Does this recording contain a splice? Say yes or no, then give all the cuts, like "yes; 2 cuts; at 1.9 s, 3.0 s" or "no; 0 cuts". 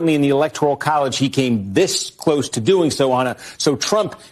no; 0 cuts